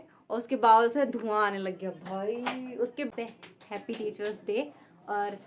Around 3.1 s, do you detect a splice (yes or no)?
yes